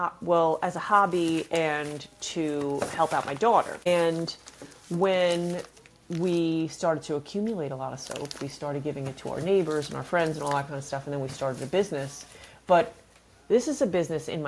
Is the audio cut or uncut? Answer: cut